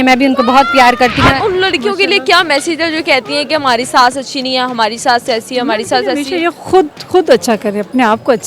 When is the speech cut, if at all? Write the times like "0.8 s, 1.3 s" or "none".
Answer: 1.4 s